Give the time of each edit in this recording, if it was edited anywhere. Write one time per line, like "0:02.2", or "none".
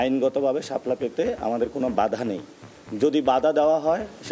none